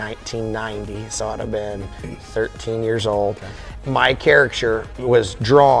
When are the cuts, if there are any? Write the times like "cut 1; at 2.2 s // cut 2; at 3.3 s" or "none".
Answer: cut 1; at 3.7 s